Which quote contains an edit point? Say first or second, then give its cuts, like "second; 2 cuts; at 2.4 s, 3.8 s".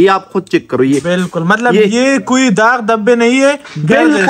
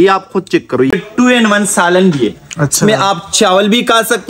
second; 1 cut; at 0.9 s